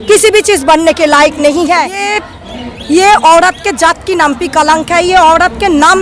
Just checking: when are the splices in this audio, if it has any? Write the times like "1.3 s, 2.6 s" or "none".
2.1 s